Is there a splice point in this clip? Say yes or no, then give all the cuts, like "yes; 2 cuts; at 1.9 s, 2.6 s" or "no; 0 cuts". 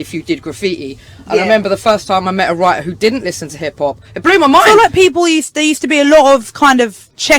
yes; 1 cut; at 4.6 s